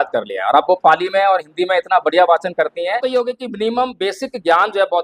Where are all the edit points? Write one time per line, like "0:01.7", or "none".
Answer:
0:03.0